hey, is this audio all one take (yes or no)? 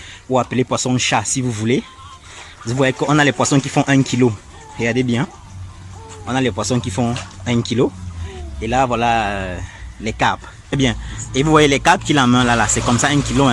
no